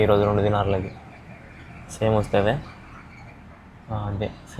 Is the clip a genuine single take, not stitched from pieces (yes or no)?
yes